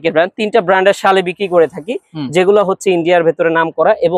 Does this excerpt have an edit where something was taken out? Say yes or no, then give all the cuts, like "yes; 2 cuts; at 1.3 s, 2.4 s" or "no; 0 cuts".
no; 0 cuts